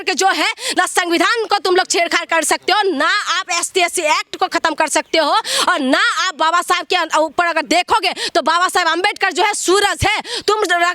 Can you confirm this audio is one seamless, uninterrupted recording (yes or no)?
yes